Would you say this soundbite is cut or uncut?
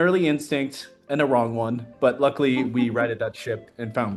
uncut